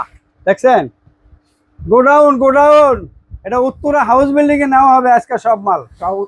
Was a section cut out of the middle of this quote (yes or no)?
no